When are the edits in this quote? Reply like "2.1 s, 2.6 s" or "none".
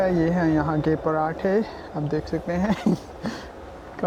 none

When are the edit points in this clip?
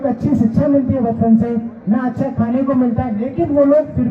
2.3 s

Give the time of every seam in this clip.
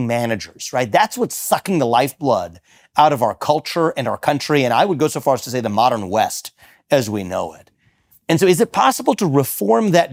none

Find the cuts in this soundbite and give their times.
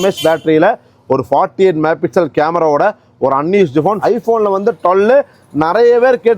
4.0 s

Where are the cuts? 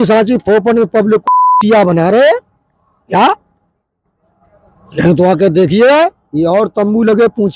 none

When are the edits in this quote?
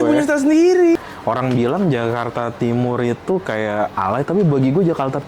1.0 s

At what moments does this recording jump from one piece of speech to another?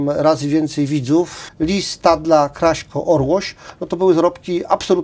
1.4 s

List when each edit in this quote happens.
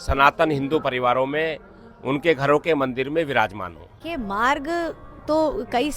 3.9 s

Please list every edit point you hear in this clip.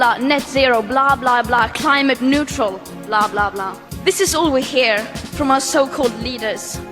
none

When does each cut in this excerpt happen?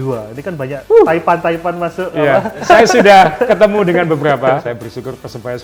0.8 s, 2.6 s, 4.6 s

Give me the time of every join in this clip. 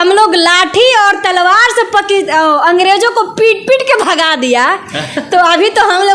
none

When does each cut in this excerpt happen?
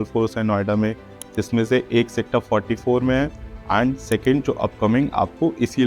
none

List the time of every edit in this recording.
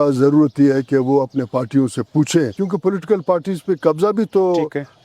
2.5 s

